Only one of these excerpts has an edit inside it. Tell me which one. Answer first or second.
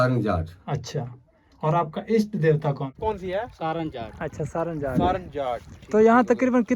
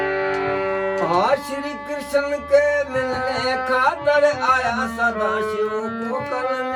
first